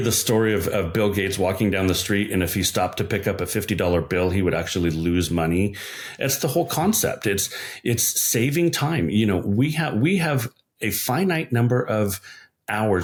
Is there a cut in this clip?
no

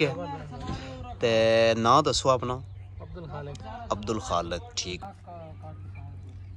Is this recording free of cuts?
no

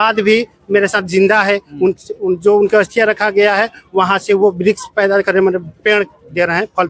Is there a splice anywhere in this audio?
no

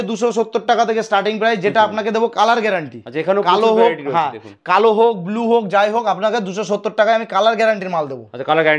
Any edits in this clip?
no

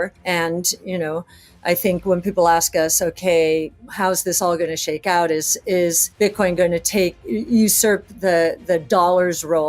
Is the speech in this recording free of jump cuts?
no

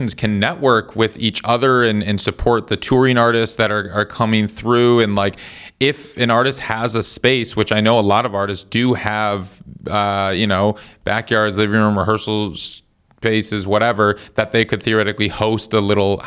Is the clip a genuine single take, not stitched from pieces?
yes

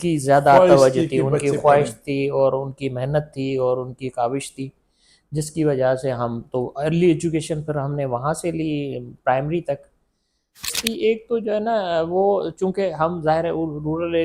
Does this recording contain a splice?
yes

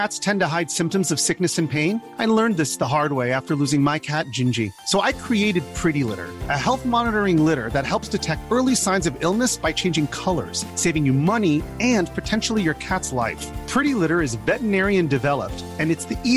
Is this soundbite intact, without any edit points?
yes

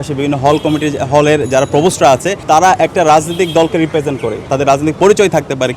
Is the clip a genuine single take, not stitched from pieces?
no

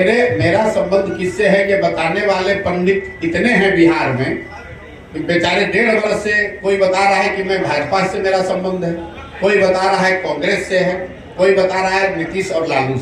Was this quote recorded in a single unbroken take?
yes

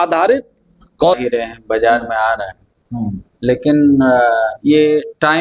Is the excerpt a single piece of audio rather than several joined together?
no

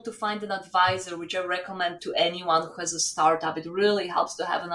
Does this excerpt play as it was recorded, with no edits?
yes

